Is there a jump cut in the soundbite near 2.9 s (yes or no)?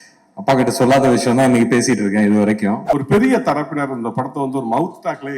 yes